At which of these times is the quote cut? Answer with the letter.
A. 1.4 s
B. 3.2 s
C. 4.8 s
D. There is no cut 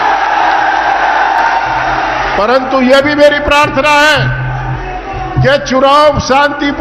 D